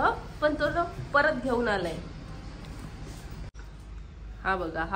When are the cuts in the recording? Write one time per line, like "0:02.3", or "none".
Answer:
0:03.5